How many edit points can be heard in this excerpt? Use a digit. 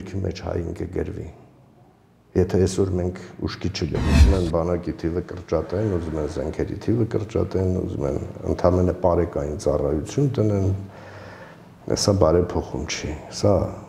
1